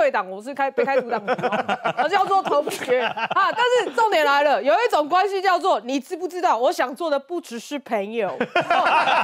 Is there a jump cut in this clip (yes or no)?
no